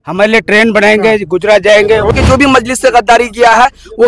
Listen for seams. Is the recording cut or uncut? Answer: cut